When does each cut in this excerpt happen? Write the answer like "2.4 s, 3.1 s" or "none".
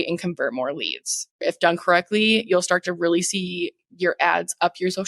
1.4 s